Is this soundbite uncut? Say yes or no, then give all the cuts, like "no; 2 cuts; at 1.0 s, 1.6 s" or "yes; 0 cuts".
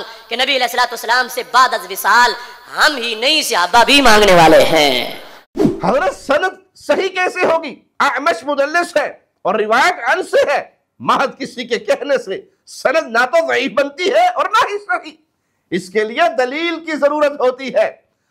yes; 0 cuts